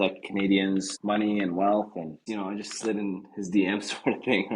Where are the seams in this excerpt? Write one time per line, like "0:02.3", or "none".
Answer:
0:00.9
0:02.2

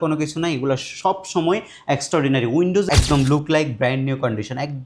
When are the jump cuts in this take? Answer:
0:02.9

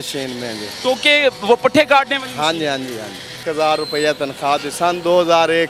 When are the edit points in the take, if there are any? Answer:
0:03.4

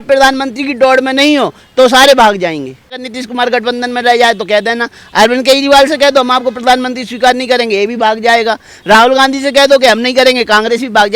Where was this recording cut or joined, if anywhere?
0:03.2

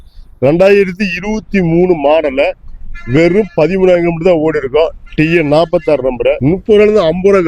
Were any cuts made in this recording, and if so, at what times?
0:06.4

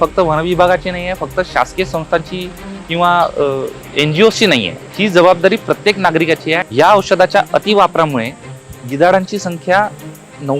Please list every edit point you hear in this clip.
0:03.8
0:04.8
0:06.7

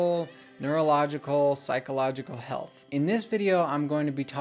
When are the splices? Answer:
0:02.9

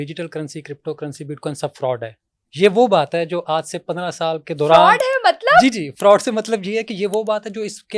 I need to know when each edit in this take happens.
none

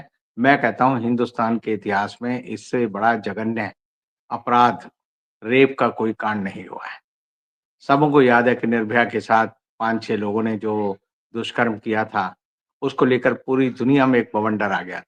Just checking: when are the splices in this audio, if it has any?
none

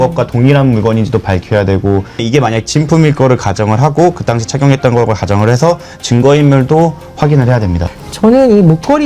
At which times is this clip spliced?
0:02.2
0:07.8

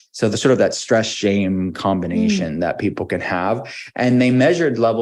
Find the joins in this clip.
none

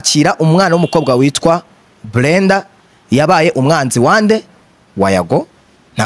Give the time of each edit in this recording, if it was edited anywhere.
none

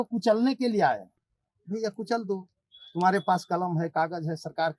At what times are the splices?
none

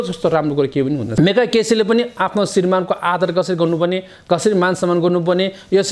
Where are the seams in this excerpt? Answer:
0:01.1

